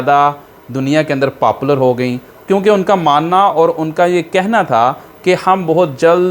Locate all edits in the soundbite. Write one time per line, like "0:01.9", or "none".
none